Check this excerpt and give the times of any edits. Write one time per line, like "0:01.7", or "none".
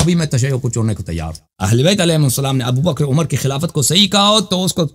none